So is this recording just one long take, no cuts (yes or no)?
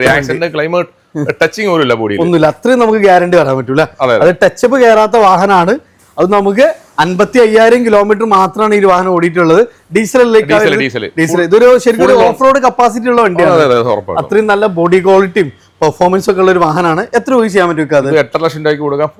yes